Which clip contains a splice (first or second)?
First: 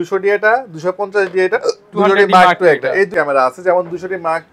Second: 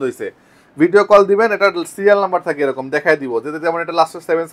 first